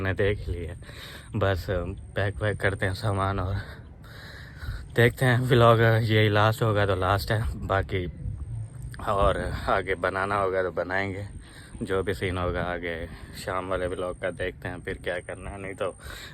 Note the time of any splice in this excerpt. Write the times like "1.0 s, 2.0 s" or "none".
none